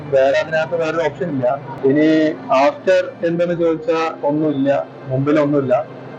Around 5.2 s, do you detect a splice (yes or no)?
no